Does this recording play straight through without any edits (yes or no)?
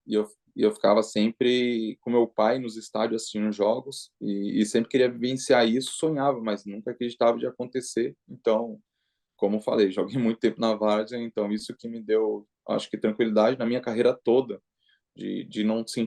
yes